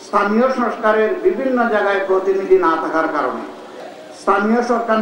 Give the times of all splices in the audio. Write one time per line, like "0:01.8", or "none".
0:03.8